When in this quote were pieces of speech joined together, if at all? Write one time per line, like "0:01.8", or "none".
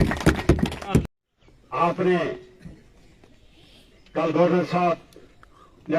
0:01.0